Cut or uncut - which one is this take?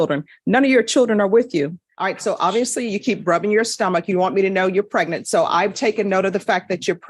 cut